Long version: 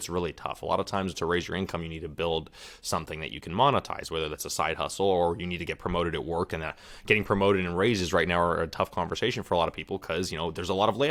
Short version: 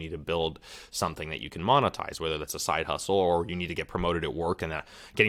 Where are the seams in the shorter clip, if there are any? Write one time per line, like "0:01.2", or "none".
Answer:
none